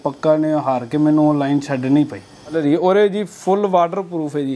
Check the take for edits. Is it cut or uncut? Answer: cut